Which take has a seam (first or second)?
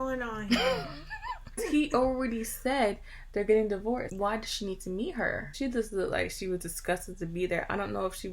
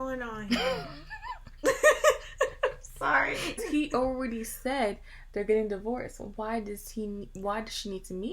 first